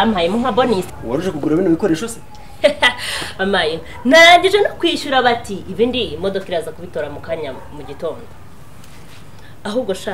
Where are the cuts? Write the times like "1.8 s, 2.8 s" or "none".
0.9 s

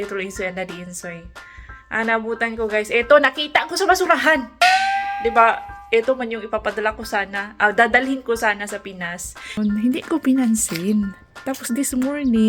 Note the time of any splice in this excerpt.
9.6 s

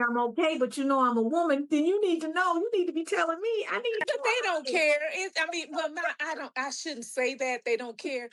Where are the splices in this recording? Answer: none

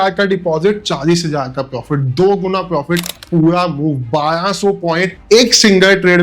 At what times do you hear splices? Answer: 3.2 s

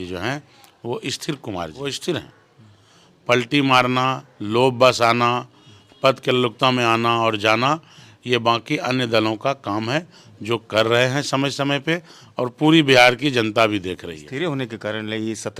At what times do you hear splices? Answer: 2.0 s, 14.2 s

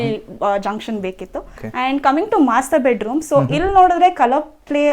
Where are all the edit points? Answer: 1.6 s

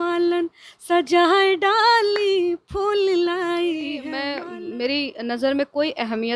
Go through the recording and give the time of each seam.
4.3 s

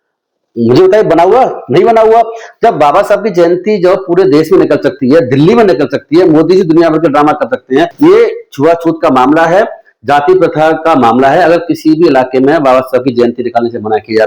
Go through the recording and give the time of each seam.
7.9 s

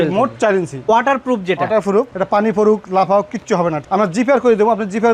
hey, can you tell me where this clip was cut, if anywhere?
0.9 s, 2.1 s, 3.8 s

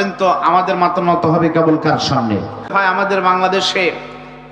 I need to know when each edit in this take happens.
2.7 s

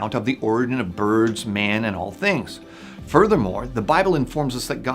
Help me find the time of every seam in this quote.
2.7 s

